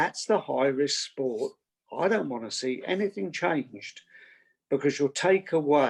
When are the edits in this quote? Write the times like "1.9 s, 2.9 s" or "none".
none

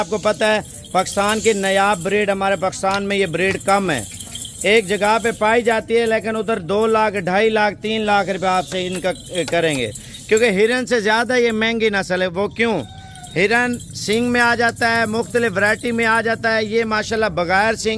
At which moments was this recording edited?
none

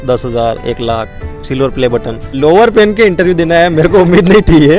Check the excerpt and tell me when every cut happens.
2.3 s

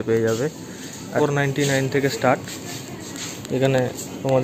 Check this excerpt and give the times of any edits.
1.2 s

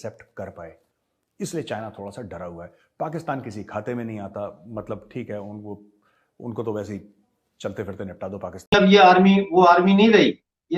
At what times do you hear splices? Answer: 8.7 s

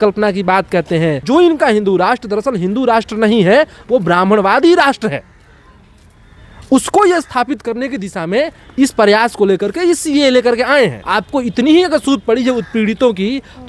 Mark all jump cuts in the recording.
1.2 s, 11.0 s

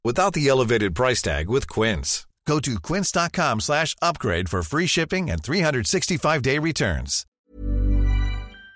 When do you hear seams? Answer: 7.3 s

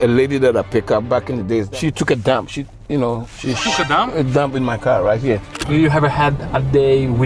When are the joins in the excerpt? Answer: 1.7 s, 5.6 s

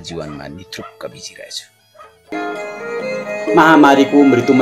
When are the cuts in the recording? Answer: 2.3 s

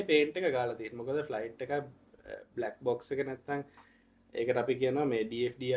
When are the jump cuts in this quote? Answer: none

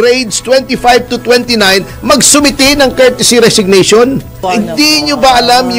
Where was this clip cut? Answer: 4.5 s

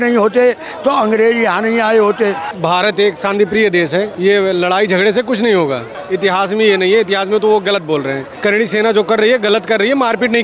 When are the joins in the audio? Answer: 2.5 s, 4.1 s, 5.9 s, 8.2 s

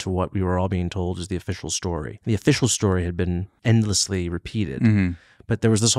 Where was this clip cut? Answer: 2.1 s, 3.5 s

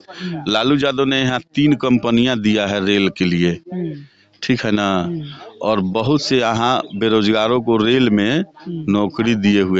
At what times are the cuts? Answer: none

